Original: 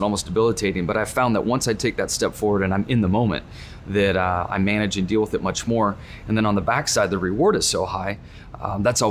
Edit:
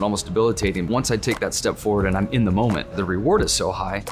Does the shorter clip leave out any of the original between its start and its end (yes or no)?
yes